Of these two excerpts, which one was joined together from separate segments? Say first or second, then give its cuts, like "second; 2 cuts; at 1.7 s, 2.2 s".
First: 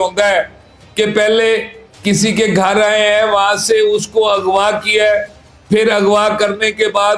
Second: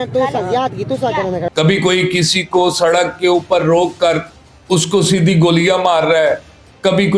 second; 1 cut; at 1.5 s